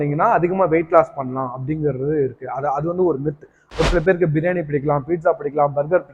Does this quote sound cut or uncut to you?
cut